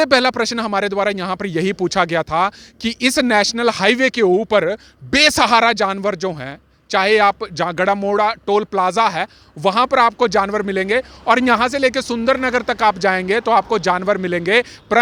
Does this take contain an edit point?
no; 0 cuts

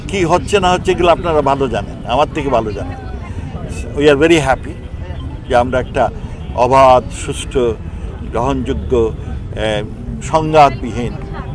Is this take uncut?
yes; 0 cuts

